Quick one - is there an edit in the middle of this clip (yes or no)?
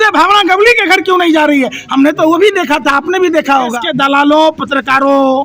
yes